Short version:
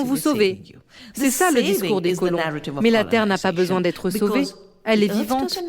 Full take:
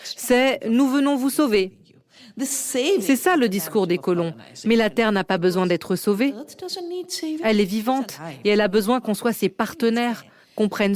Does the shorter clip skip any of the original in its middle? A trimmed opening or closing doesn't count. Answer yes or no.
yes